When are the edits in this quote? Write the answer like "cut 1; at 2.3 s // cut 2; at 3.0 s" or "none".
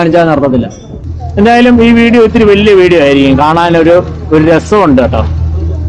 cut 1; at 1.0 s